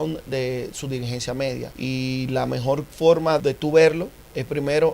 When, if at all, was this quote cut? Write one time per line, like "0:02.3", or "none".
0:01.7
0:03.4